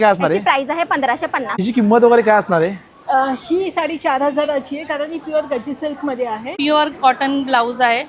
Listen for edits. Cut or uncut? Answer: cut